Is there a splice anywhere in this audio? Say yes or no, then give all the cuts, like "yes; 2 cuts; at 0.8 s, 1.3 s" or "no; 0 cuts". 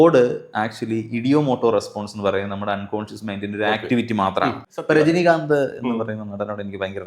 yes; 1 cut; at 4.7 s